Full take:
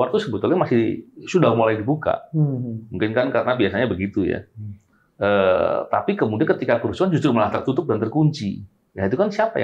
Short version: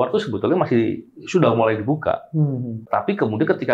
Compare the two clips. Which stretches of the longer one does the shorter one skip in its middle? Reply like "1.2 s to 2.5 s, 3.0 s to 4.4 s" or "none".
2.9 s to 5.9 s